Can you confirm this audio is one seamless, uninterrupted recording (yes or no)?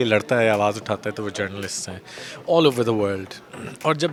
yes